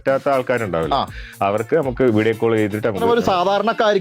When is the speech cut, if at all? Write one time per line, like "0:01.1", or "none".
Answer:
0:03.0